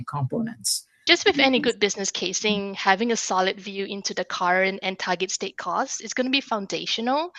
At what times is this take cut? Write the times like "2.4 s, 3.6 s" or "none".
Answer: 1.0 s